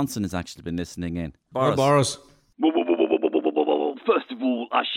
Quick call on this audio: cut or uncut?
cut